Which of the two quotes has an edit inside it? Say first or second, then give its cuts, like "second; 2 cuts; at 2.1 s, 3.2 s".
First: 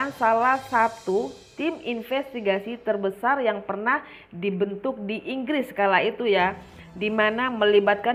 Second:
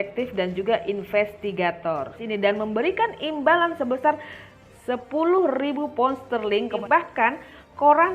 second; 2 cuts; at 2.2 s, 6.8 s